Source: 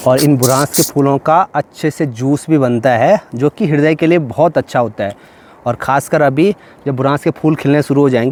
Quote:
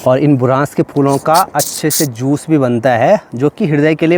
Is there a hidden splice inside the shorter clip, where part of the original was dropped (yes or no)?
no